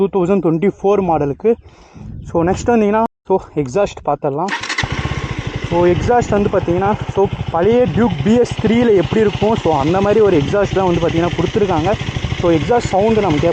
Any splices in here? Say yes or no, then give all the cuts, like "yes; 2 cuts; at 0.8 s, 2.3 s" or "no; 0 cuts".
yes; 1 cut; at 3.1 s